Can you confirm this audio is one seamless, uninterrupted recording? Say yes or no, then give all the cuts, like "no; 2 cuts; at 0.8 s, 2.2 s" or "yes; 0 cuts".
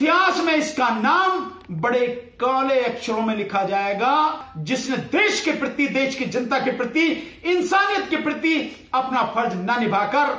no; 1 cut; at 4.5 s